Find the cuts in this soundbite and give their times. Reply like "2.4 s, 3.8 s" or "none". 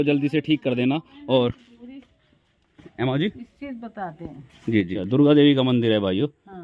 4.9 s